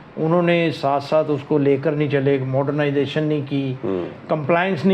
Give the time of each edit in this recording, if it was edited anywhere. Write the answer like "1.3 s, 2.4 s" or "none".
none